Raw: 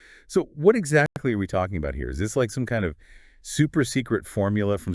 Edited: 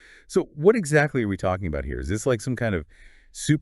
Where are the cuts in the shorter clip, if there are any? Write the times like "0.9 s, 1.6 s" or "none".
1.1 s